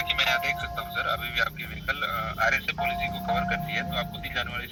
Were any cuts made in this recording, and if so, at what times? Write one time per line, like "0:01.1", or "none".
none